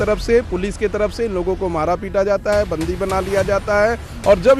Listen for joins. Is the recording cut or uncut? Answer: uncut